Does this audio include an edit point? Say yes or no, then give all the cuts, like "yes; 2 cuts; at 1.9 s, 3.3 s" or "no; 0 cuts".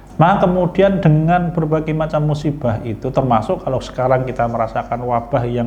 no; 0 cuts